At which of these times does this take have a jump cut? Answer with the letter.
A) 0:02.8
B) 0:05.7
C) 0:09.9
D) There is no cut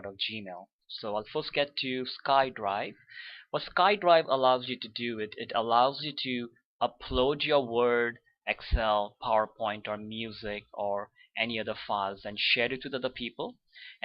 B